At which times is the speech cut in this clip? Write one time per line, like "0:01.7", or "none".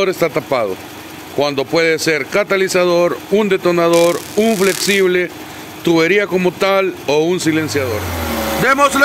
0:08.1